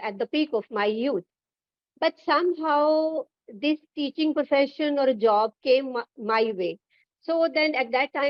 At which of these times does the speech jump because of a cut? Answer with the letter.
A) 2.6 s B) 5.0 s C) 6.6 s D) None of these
D